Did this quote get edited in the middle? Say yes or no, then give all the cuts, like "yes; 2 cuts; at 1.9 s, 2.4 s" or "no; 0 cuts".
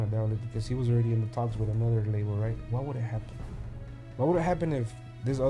no; 0 cuts